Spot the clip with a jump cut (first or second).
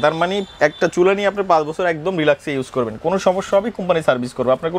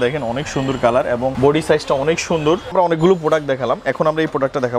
second